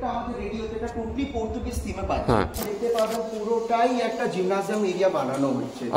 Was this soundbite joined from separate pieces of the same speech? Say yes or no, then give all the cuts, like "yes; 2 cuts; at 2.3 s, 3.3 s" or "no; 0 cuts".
yes; 1 cut; at 2.6 s